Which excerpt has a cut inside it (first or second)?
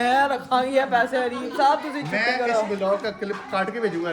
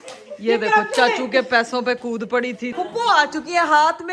second